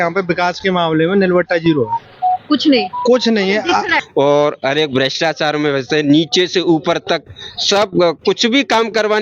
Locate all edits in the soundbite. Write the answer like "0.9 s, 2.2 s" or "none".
4.0 s